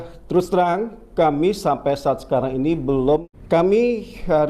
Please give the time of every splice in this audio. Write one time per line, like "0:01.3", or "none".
0:03.3